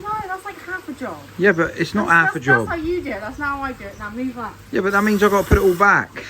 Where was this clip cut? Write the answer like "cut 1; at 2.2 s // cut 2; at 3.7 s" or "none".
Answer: none